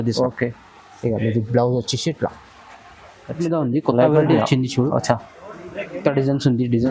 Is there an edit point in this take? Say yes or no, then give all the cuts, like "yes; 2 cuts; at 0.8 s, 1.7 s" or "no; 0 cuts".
yes; 1 cut; at 3.4 s